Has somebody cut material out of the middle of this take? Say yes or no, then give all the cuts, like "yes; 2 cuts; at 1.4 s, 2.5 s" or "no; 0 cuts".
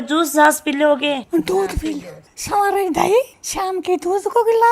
no; 0 cuts